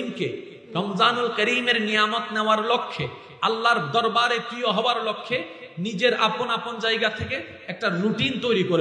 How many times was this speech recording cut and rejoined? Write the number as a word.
zero